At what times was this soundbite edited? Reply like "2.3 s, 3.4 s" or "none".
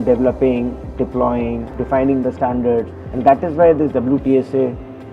1.7 s

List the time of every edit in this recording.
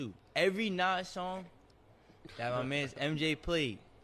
none

